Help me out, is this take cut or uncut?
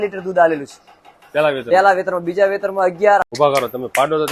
cut